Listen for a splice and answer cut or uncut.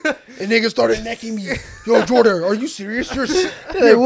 uncut